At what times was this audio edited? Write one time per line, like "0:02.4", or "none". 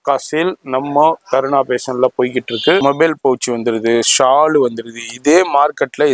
0:02.8